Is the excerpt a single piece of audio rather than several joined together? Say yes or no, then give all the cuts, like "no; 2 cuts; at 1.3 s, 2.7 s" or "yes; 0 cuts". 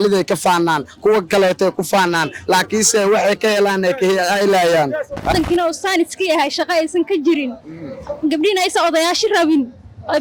no; 1 cut; at 5.3 s